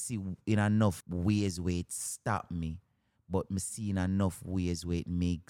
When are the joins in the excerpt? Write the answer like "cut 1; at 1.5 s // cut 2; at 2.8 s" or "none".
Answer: cut 1; at 1.0 s